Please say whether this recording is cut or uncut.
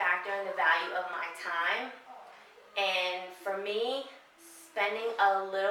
uncut